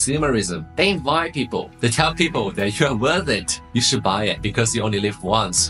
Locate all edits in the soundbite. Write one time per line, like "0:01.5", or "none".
none